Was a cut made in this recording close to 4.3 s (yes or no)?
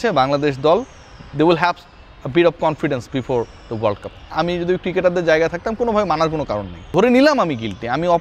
yes